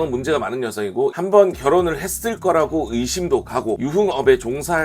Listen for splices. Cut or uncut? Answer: cut